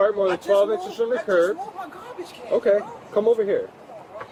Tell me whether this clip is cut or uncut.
uncut